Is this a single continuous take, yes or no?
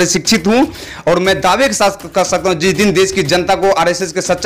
yes